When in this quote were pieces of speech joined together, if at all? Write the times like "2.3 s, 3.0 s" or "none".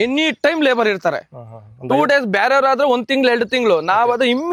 none